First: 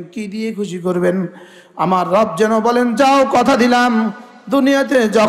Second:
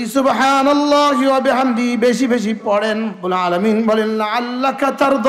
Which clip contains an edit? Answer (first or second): second